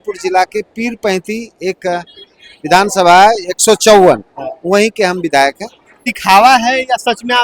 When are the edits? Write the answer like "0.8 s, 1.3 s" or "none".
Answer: 6.1 s